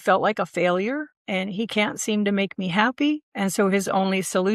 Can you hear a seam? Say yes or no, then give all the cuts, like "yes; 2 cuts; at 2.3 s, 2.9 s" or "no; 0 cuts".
yes; 2 cuts; at 1.1 s, 3.3 s